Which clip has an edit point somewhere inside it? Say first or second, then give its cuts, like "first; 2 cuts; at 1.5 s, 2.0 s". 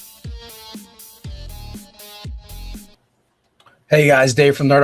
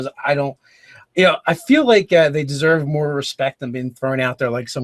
first; 1 cut; at 2.7 s